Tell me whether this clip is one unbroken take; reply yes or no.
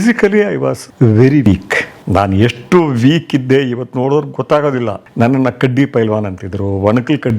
no